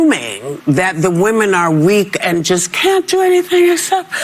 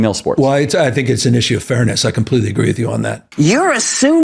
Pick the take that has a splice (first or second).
second